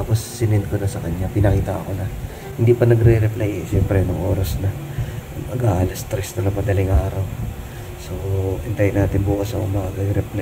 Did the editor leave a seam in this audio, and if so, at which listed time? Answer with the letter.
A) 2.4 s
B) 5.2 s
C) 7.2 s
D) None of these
D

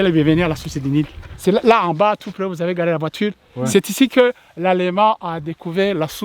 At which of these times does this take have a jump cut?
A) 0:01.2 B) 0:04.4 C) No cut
A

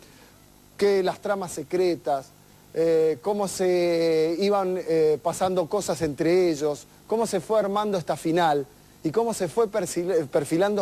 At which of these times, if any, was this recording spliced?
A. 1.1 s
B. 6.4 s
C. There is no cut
B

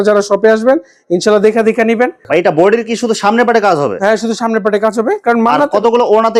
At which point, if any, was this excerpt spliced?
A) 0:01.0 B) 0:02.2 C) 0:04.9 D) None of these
D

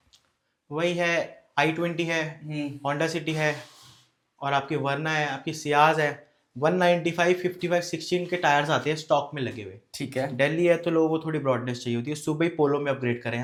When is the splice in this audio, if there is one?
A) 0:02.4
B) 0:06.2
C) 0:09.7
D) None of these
D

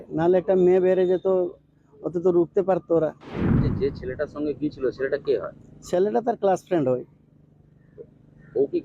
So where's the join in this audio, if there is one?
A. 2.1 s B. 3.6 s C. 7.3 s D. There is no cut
B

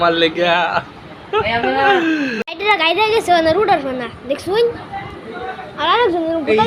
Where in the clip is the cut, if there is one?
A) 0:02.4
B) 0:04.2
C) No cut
A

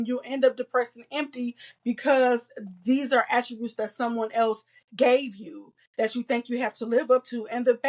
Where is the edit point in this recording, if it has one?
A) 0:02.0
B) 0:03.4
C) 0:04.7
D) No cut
D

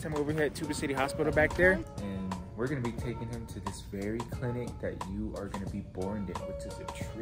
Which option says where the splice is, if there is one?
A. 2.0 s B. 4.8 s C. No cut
A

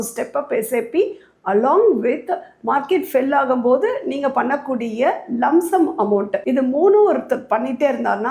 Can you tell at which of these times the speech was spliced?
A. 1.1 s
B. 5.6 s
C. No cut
C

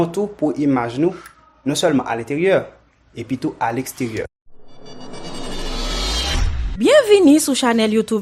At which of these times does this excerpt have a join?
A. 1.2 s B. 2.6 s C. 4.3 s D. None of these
C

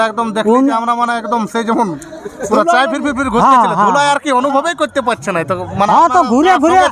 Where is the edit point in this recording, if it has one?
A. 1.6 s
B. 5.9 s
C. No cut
C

